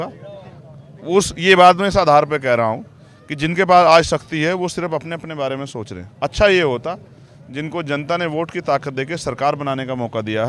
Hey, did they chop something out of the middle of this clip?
no; 0 cuts

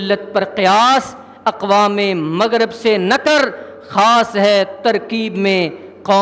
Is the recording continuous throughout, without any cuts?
yes; 0 cuts

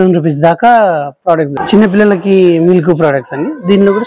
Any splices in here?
yes; 1 cut; at 1.6 s

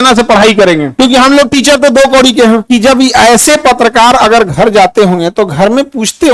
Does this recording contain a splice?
yes; 1 cut; at 2.6 s

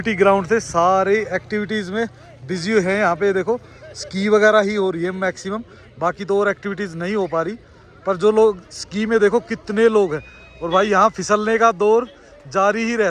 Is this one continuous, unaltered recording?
yes; 0 cuts

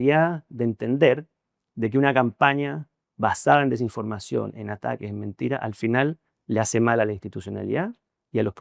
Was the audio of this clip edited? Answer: no; 0 cuts

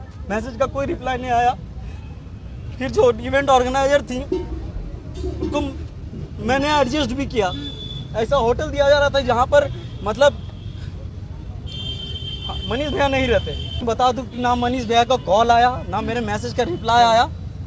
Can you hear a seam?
yes; 1 cut; at 13.8 s

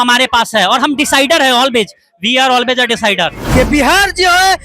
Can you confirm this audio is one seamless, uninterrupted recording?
no; 1 cut; at 3.4 s

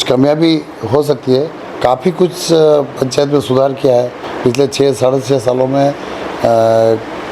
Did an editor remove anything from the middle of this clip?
no; 0 cuts

